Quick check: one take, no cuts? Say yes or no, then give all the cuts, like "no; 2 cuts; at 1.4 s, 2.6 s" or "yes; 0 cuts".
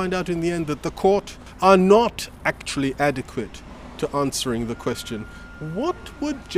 no; 1 cut; at 1.4 s